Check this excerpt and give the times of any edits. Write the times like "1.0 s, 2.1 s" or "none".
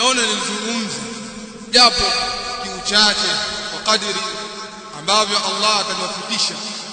1.6 s